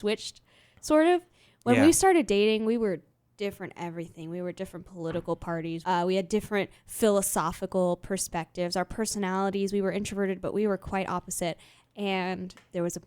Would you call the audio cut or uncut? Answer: cut